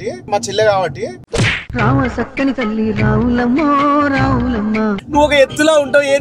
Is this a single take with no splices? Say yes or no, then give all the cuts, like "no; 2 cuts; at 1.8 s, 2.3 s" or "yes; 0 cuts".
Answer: no; 1 cut; at 5.0 s